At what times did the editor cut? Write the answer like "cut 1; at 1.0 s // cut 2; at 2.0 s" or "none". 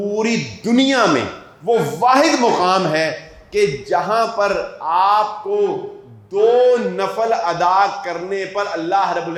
none